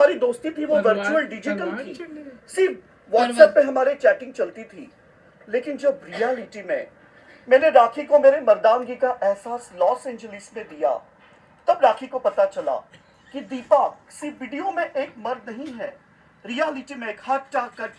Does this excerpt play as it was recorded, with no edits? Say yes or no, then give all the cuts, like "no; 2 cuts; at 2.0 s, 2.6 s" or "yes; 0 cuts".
yes; 0 cuts